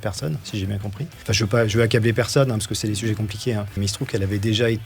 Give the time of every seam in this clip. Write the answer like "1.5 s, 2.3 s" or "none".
1.1 s, 3.8 s